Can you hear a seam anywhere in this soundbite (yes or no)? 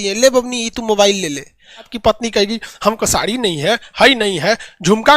yes